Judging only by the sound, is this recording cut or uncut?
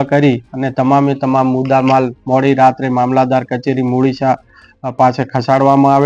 uncut